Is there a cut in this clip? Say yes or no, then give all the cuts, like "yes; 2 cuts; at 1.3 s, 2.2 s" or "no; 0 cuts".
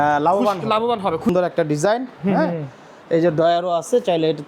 yes; 1 cut; at 1.3 s